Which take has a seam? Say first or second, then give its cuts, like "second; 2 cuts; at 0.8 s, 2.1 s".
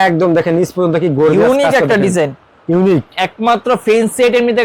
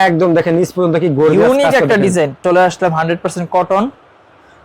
second; 1 cut; at 2.4 s